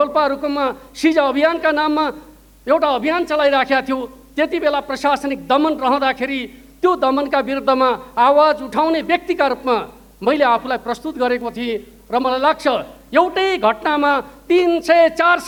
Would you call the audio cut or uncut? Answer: uncut